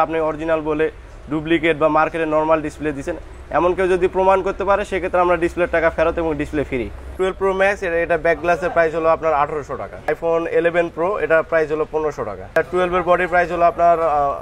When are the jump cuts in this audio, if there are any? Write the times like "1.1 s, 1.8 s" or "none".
7.1 s, 10.0 s, 12.6 s